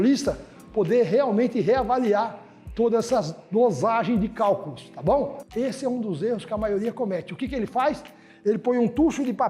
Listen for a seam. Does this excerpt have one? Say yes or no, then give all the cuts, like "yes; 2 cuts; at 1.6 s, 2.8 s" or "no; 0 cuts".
yes; 1 cut; at 5.4 s